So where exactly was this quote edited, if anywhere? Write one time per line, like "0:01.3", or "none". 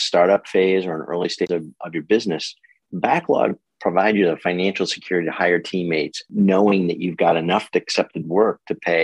0:01.5
0:06.3